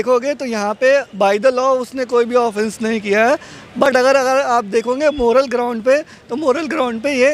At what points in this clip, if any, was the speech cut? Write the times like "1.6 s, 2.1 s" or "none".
none